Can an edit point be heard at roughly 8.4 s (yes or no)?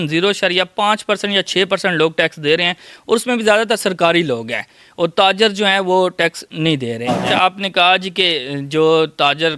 no